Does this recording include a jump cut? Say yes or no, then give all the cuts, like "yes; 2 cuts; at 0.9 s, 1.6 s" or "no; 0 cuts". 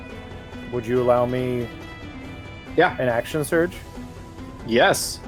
no; 0 cuts